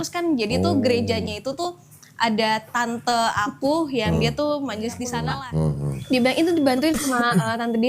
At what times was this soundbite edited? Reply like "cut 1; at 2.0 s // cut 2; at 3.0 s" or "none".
cut 1; at 5.3 s